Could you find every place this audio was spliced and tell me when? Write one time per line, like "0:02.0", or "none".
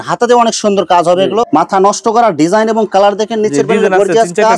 0:01.5